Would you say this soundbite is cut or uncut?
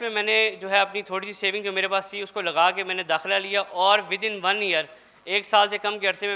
uncut